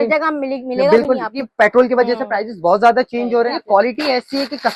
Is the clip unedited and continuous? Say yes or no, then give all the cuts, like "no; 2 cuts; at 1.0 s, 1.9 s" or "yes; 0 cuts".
no; 2 cuts; at 1.4 s, 3.5 s